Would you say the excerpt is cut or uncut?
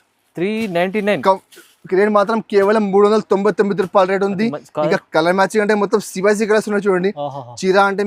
uncut